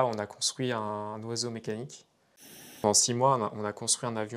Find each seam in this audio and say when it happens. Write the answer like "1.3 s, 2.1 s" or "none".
2.6 s